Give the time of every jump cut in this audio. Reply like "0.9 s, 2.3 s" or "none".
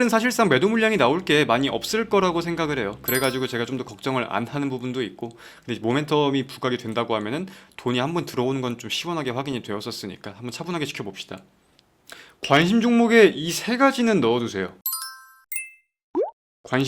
11.9 s